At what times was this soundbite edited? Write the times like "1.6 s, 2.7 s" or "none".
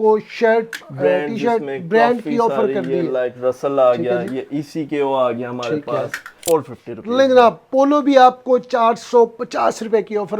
6.3 s